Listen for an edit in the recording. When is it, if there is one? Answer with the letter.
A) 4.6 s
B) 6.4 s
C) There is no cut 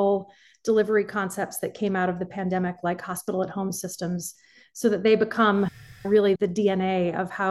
B